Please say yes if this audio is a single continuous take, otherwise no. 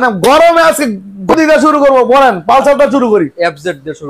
yes